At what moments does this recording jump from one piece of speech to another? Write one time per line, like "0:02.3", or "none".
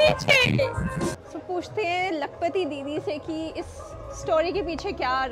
0:01.1